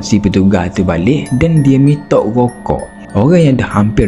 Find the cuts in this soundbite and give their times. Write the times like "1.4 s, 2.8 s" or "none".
3.0 s